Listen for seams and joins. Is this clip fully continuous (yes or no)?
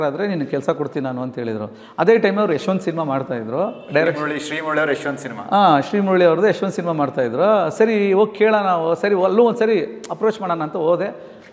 yes